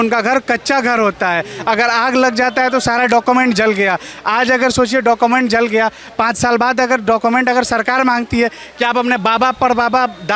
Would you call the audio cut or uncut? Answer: uncut